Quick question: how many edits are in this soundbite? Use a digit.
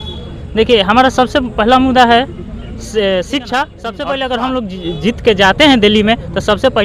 1